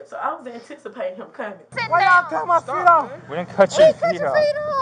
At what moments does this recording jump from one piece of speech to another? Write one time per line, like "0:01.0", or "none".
0:01.7